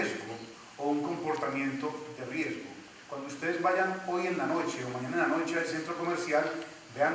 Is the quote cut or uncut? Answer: uncut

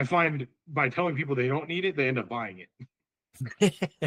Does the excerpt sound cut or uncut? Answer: uncut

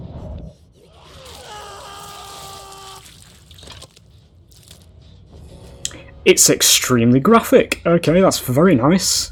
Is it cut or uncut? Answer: uncut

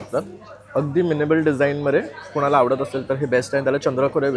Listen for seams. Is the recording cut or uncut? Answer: uncut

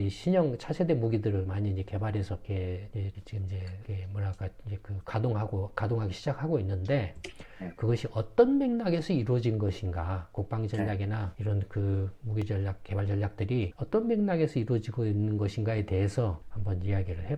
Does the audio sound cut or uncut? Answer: uncut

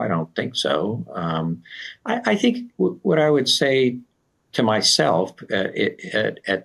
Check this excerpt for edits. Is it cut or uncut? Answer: uncut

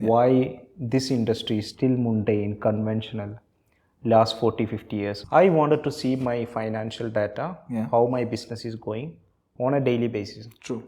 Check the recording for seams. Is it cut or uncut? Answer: cut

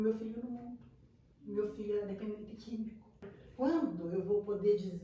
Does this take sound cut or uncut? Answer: cut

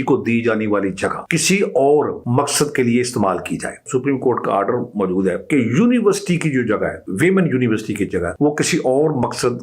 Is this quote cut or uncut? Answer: cut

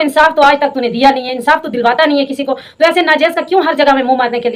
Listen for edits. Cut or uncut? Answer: uncut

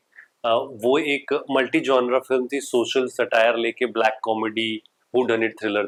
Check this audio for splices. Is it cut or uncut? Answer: uncut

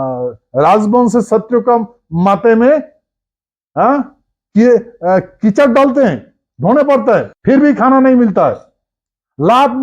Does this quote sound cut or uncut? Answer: cut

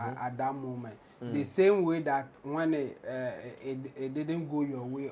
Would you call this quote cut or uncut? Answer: uncut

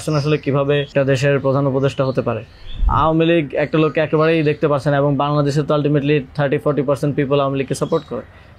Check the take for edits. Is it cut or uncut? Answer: cut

